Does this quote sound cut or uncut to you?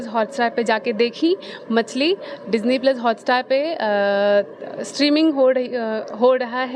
uncut